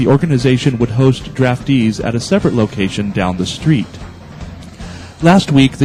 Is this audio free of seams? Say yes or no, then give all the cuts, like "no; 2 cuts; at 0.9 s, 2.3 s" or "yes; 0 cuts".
yes; 0 cuts